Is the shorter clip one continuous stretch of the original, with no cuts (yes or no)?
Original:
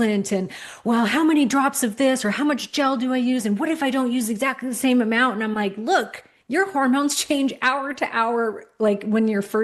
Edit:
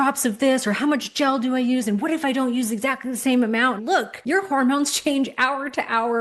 no